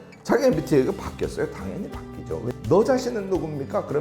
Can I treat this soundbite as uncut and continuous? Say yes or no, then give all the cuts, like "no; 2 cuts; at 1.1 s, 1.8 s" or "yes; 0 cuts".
no; 1 cut; at 2.5 s